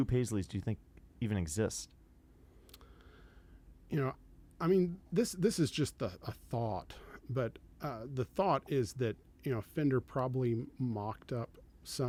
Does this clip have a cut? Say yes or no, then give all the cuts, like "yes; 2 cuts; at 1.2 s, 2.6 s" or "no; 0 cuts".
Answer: no; 0 cuts